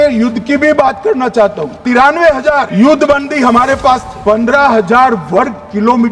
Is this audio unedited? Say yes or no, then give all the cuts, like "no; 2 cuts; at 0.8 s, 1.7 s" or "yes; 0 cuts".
no; 3 cuts; at 1.8 s, 2.7 s, 4.1 s